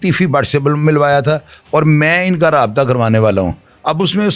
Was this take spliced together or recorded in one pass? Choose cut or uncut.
uncut